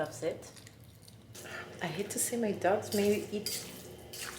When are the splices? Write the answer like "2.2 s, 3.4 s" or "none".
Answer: 1.3 s